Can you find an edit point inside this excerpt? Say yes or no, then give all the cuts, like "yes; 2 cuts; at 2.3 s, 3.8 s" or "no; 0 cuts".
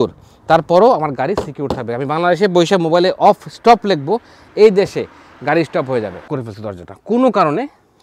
yes; 1 cut; at 6.3 s